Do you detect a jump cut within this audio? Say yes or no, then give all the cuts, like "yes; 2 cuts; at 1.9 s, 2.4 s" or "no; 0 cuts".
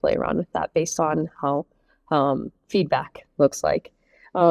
no; 0 cuts